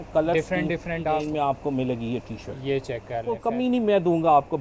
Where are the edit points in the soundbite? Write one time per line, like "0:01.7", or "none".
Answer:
0:01.1
0:03.4